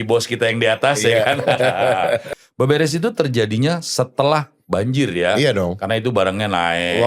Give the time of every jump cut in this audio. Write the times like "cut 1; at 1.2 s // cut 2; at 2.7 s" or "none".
cut 1; at 2.3 s